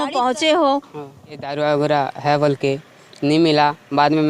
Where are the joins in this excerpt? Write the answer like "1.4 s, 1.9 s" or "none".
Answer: 1.5 s